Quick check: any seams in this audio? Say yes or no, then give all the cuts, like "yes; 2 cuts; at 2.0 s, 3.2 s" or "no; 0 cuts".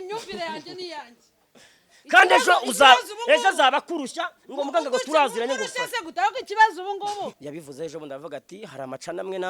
yes; 1 cut; at 7.5 s